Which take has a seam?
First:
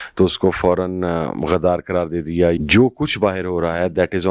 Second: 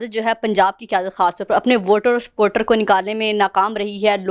first; 1 cut; at 2.6 s

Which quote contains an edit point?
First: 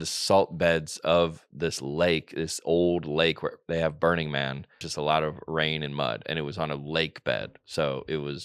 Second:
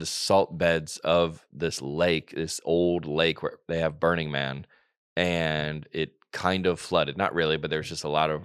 first; 1 cut; at 4.9 s

